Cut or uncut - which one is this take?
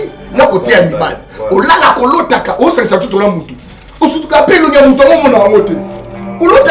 uncut